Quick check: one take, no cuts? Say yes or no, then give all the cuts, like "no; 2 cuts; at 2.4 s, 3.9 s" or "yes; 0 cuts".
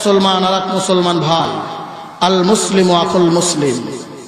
no; 1 cut; at 1.4 s